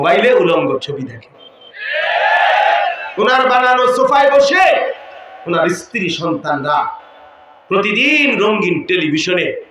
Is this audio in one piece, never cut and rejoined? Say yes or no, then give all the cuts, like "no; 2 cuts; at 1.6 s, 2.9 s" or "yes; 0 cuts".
yes; 0 cuts